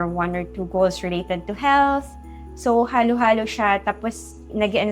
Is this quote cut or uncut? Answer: uncut